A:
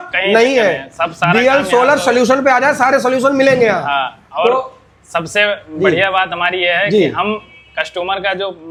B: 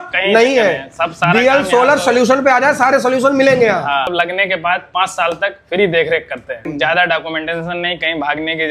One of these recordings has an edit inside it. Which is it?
B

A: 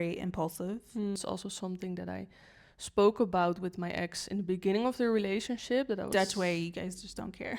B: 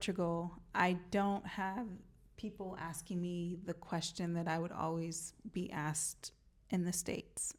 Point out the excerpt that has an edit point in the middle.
A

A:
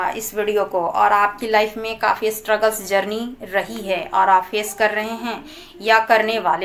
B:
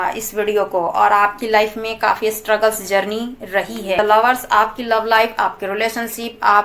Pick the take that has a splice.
B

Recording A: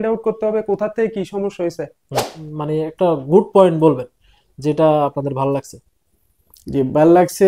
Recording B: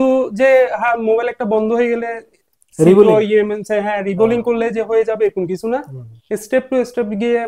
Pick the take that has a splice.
A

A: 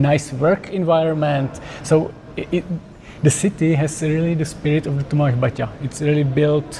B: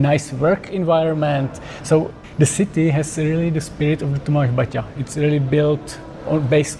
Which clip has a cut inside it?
B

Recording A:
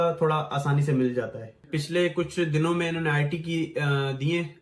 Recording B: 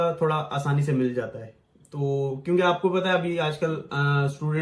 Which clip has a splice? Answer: A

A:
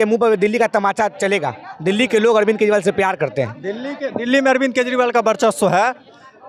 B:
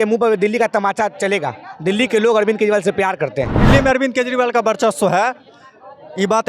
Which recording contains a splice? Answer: B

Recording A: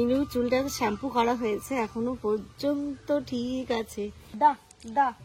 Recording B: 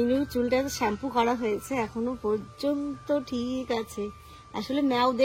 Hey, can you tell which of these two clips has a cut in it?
A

